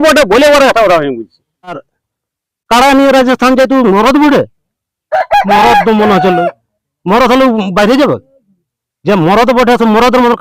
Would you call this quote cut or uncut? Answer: cut